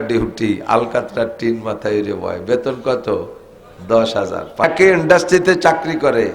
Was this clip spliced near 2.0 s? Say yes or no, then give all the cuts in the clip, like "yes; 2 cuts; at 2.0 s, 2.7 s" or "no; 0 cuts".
no; 1 cut; at 4.6 s